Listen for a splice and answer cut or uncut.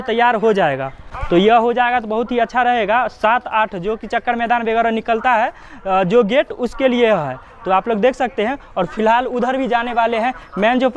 uncut